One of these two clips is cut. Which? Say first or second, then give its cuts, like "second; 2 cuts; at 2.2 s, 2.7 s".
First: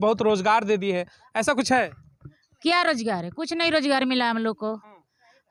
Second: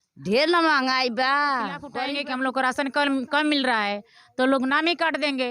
second; 1 cut; at 1.9 s